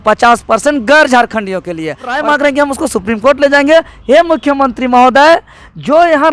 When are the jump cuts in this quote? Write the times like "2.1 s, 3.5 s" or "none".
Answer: 2.2 s